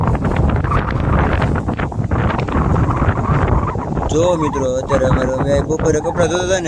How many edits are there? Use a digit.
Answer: 0